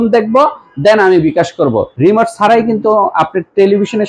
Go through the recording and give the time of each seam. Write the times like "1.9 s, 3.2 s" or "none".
1.9 s